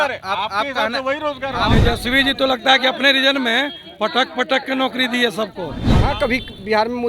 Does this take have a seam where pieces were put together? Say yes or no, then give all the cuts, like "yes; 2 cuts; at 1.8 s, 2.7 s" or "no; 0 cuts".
yes; 2 cuts; at 1.7 s, 5.8 s